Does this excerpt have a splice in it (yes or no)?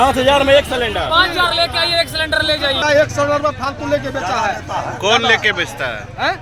yes